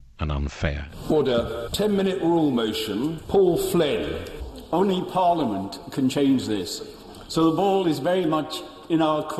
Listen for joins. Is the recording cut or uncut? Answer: cut